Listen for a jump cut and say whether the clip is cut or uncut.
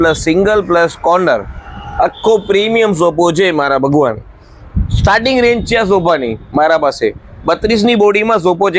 uncut